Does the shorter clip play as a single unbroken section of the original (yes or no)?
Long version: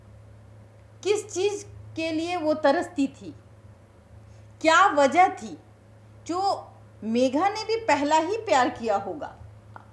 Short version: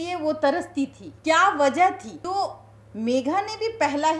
no